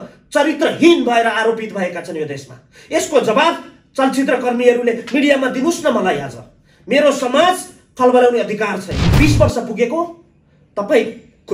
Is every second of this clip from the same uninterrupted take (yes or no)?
no